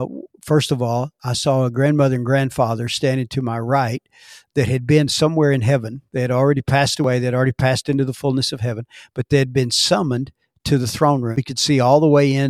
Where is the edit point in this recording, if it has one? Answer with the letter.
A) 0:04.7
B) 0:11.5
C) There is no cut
B